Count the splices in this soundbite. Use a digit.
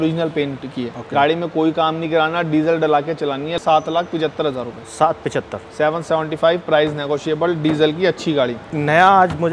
3